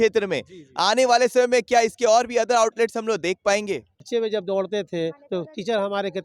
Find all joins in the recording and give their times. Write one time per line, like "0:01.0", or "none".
0:04.1